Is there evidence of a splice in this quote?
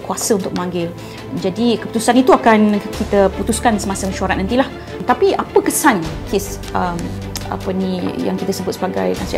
yes; 1 cut; at 5.0 s

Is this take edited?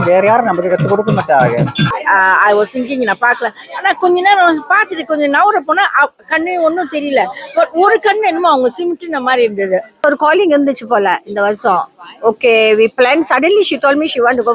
yes; 2 cuts; at 2.0 s, 10.0 s

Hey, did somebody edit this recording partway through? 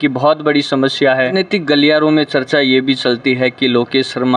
yes; 1 cut; at 1.3 s

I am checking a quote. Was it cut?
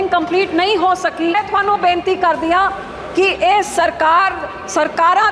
yes; 1 cut; at 1.3 s

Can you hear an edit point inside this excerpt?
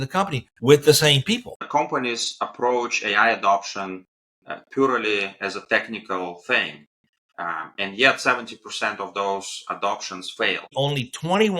yes; 2 cuts; at 1.7 s, 10.7 s

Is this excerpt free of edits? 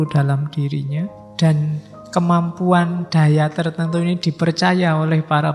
no; 1 cut; at 1.2 s

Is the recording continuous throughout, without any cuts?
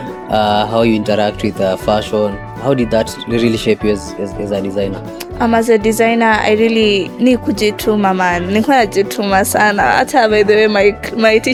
yes; 0 cuts

